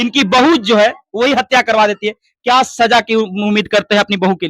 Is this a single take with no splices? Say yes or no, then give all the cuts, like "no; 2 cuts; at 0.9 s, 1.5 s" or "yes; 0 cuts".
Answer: yes; 0 cuts